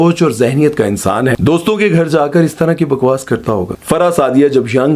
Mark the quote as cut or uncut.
cut